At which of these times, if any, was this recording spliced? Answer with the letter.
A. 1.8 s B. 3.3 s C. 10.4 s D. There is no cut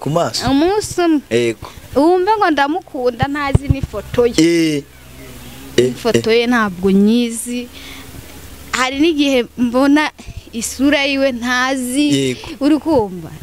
D